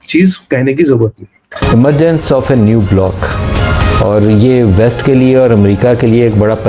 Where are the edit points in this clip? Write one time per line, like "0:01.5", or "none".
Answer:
0:01.6